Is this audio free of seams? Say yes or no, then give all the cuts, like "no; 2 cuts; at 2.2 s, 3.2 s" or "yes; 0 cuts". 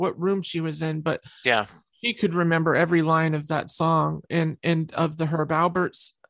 yes; 0 cuts